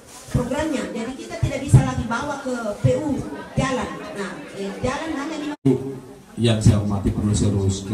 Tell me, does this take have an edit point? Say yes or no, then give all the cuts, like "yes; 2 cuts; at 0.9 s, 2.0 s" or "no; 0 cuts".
yes; 1 cut; at 5.5 s